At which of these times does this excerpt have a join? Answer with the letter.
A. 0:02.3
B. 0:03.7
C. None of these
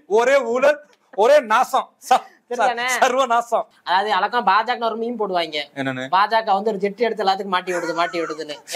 B